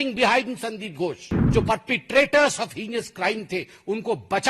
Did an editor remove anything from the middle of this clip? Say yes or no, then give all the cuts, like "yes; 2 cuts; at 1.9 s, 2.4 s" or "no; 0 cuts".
yes; 1 cut; at 1.4 s